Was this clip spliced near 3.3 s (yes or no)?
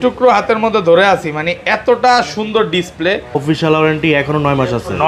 yes